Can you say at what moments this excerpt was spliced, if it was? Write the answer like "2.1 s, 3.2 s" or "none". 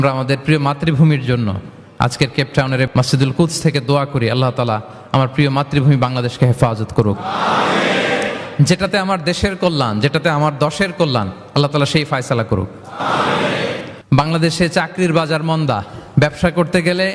2.9 s, 13.9 s